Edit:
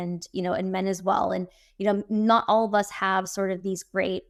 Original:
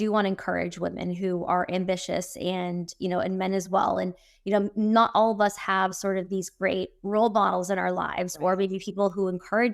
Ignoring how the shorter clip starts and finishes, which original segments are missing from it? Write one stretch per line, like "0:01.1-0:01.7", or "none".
none